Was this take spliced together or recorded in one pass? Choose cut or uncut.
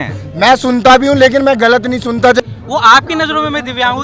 cut